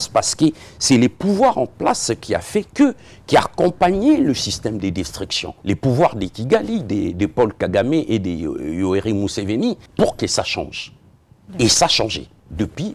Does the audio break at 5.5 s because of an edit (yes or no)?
yes